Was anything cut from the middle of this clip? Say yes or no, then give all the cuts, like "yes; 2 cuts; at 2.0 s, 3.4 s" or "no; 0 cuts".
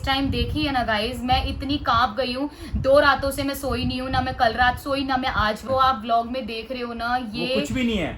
yes; 1 cut; at 5.6 s